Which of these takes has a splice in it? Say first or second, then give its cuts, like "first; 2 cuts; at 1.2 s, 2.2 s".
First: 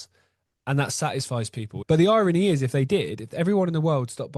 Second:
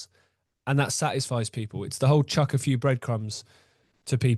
first; 1 cut; at 1.7 s